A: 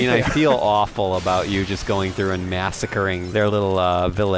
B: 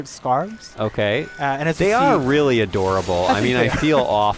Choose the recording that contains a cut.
A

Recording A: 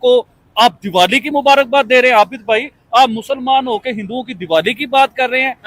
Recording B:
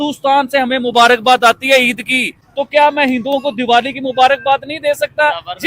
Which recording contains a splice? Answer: B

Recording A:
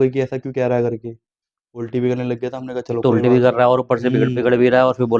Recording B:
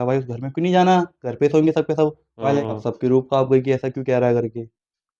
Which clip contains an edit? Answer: B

